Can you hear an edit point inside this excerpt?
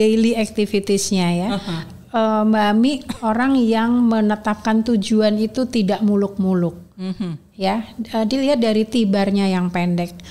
no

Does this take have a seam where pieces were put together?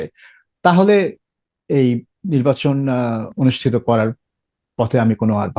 yes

